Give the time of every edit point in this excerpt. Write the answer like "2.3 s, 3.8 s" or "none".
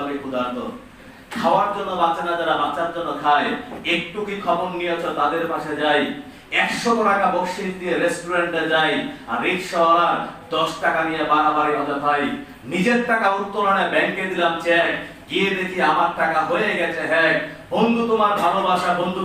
1.1 s